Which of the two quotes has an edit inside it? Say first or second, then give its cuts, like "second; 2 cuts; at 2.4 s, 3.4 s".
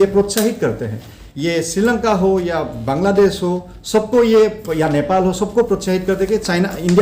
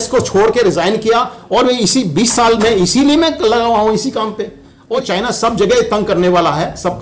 second; 1 cut; at 5.0 s